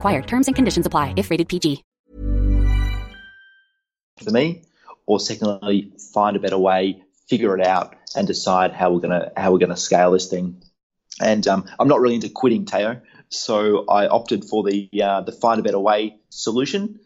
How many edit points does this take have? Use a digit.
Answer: 0